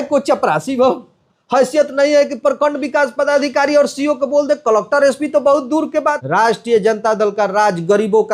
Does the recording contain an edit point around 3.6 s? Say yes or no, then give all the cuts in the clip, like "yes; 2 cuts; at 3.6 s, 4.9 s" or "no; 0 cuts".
no; 1 cut; at 6.2 s